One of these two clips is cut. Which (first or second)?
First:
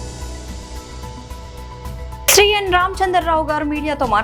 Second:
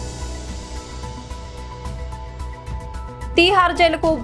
second